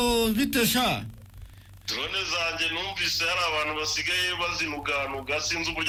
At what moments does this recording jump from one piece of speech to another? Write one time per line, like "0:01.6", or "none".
none